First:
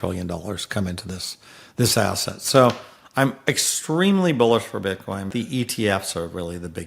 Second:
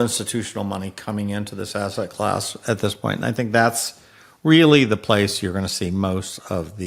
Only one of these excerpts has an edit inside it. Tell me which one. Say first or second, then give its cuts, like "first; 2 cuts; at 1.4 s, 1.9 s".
first; 1 cut; at 5.3 s